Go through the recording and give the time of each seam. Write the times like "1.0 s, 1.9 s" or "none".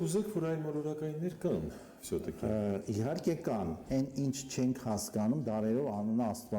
3.8 s